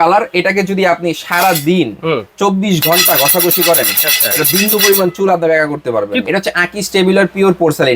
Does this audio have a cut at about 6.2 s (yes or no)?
yes